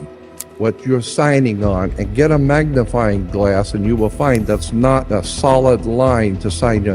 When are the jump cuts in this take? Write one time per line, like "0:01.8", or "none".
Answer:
0:05.0